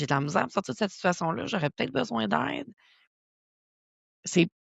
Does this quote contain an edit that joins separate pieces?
no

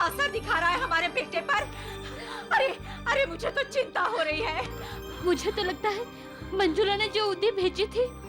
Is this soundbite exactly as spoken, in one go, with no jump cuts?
yes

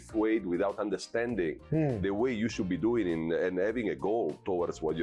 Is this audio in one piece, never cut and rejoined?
yes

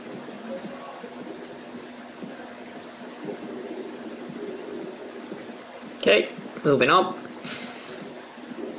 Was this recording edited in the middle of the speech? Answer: yes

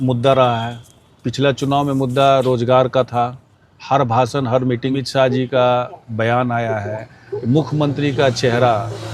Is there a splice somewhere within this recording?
yes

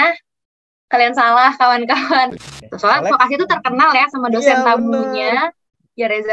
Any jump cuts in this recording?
yes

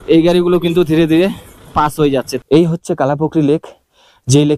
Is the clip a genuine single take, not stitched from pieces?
no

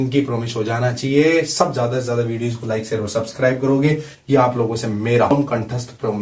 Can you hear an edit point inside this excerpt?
yes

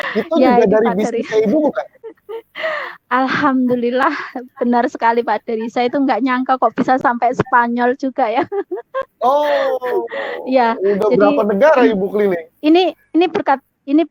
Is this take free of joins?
yes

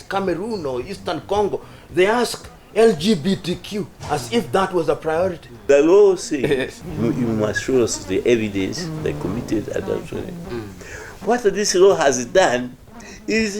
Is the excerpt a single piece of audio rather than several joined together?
no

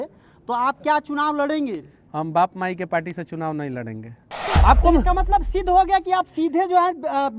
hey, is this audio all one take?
no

